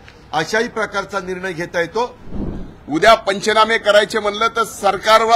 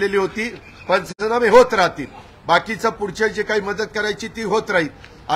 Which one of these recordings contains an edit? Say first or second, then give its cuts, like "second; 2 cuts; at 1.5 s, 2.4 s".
first; 1 cut; at 2.3 s